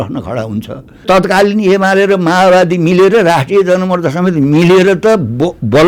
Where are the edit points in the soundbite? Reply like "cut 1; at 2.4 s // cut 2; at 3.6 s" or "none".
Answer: cut 1; at 1.0 s

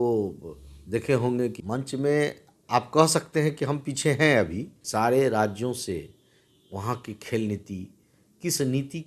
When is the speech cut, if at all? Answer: cut 1; at 1.6 s // cut 2; at 4.8 s

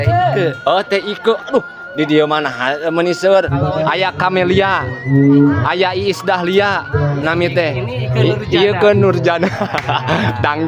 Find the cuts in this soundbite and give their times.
none

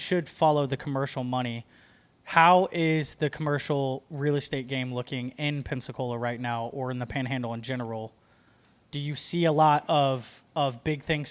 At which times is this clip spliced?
none

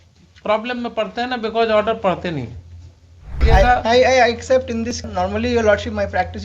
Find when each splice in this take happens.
cut 1; at 3.4 s // cut 2; at 5.0 s

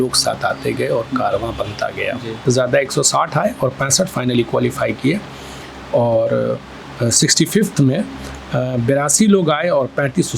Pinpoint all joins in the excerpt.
cut 1; at 2.3 s

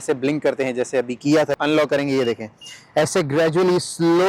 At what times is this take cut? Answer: cut 1; at 1.6 s

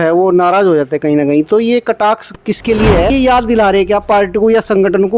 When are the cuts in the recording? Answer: cut 1; at 3.1 s

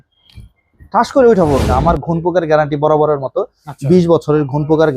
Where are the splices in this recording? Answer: cut 1; at 1.7 s

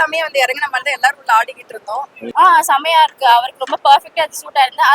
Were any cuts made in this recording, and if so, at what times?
cut 1; at 2.2 s

